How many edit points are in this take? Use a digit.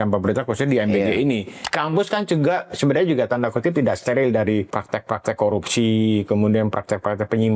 2